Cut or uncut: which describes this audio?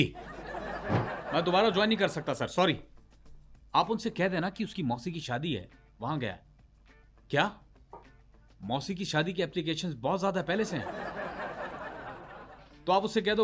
cut